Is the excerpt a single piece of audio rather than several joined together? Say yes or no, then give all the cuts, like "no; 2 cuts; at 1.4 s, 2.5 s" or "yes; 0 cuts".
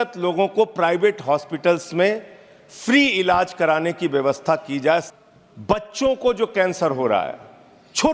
no; 1 cut; at 5.1 s